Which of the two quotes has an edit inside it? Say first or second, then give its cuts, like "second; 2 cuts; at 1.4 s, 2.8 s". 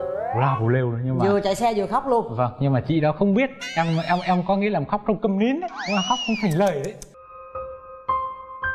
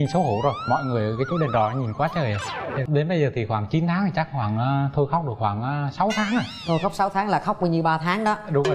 second; 1 cut; at 2.8 s